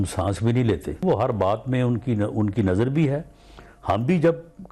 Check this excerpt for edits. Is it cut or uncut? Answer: cut